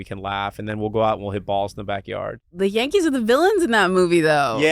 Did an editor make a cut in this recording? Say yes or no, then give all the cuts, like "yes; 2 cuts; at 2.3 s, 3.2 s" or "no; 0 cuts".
yes; 1 cut; at 2.4 s